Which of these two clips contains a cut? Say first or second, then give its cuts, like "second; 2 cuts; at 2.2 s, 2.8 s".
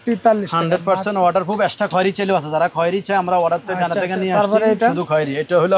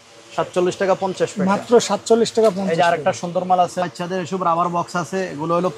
second; 1 cut; at 3.9 s